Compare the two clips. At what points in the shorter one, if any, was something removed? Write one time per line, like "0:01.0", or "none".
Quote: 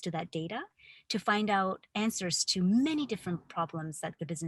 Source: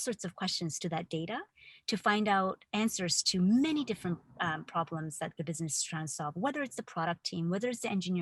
0:03.5